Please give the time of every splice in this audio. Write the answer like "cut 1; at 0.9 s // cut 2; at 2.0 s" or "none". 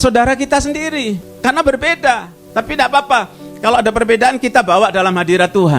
cut 1; at 1.3 s // cut 2; at 2.3 s